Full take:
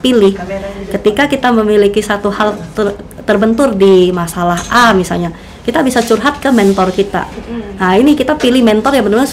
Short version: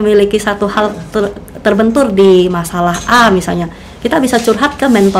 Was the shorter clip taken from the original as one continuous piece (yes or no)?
yes